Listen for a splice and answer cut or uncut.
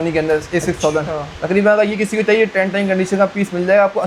uncut